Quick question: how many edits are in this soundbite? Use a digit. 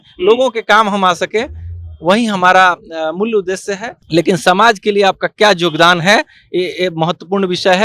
1